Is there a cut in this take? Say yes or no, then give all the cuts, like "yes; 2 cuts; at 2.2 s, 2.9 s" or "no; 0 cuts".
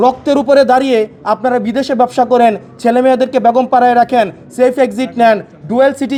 no; 0 cuts